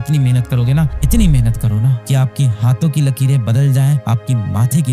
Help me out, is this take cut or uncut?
uncut